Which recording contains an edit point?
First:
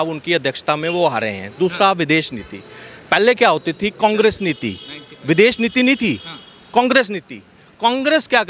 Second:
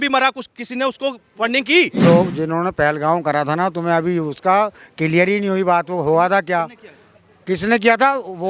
second; 1 cut; at 2.0 s

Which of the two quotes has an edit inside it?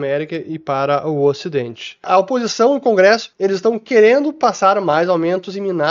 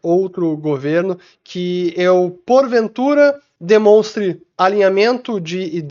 first; 2 cuts; at 2.0 s, 3.3 s

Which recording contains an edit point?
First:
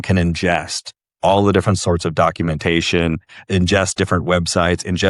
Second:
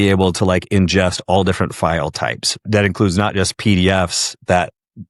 second; 1 cut; at 2.5 s

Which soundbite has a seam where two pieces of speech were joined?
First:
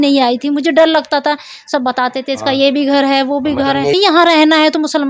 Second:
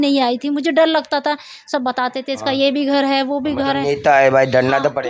first; 1 cut; at 4.0 s

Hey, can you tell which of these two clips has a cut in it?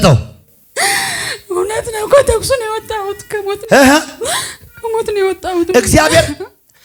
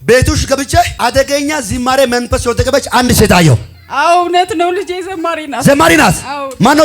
second; 1 cut; at 0.9 s

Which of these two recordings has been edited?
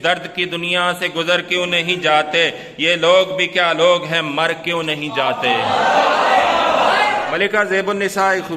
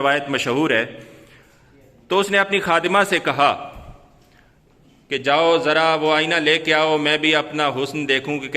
first; 1 cut; at 7.2 s

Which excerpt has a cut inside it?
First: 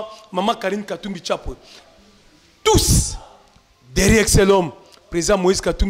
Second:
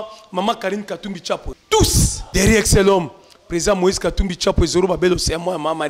second; 2 cuts; at 1.5 s, 2.2 s

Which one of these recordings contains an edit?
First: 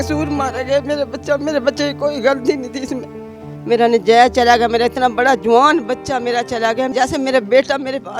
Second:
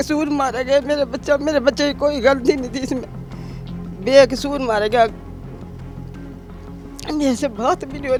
first; 2 cuts; at 3.6 s, 6.9 s

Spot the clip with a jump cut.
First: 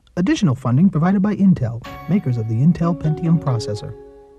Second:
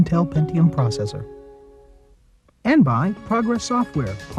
second; 1 cut; at 2.6 s

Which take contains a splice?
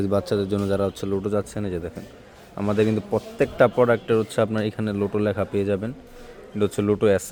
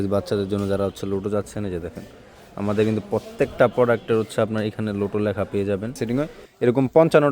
second; 1 cut; at 6.4 s

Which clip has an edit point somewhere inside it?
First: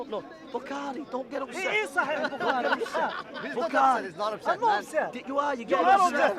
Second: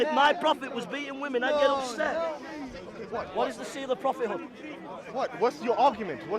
second; 1 cut; at 2.4 s

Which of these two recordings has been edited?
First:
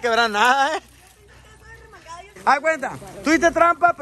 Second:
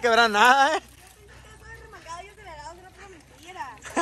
first; 1 cut; at 2.4 s

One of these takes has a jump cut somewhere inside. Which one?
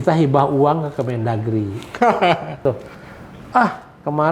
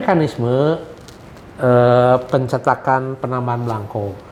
first; 1 cut; at 2.6 s

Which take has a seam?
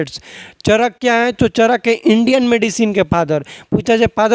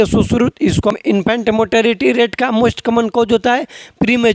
second; 1 cut; at 1.0 s

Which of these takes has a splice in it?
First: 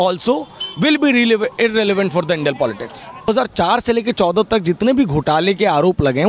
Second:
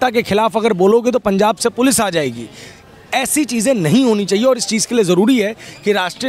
first; 1 cut; at 3.3 s

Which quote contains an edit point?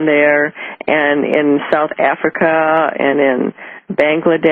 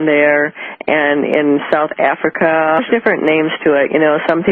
first; 1 cut; at 2.8 s

